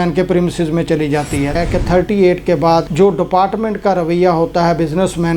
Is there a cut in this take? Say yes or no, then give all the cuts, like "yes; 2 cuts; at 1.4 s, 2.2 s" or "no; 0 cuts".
yes; 1 cut; at 1.5 s